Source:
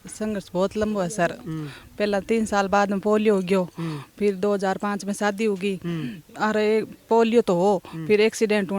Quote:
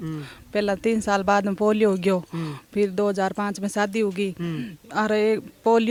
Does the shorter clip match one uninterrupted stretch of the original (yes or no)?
yes